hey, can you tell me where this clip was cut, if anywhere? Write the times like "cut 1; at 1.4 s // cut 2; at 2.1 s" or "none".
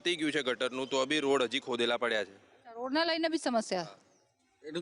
none